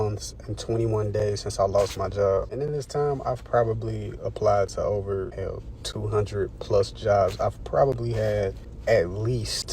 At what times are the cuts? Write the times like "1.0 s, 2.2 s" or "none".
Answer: 2.5 s, 5.3 s, 8.7 s

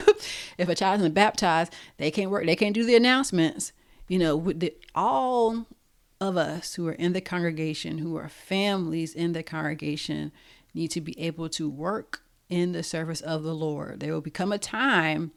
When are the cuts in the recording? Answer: none

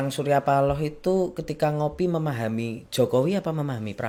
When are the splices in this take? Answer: none

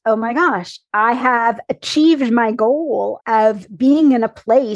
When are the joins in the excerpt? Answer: 3.2 s

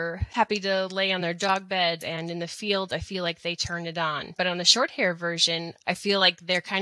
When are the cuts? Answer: 2.0 s, 4.3 s, 5.7 s

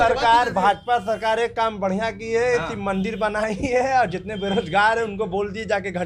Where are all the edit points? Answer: none

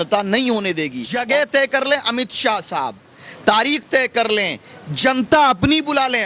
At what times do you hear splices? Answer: 1.1 s

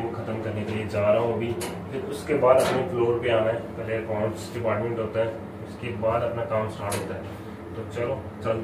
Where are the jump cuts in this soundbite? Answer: none

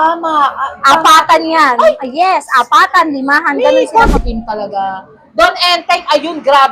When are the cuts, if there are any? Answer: 4.2 s

